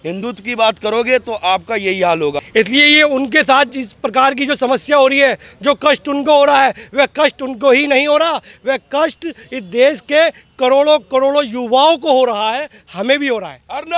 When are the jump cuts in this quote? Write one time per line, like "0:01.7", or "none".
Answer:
0:02.4